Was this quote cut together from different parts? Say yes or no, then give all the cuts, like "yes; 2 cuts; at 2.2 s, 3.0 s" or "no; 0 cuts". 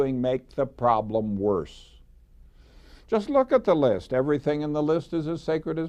yes; 1 cut; at 3.5 s